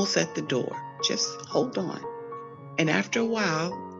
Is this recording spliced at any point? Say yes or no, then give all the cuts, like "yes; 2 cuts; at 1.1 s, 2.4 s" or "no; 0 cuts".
no; 0 cuts